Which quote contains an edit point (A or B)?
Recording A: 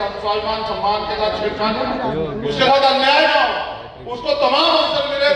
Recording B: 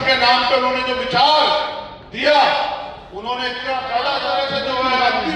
B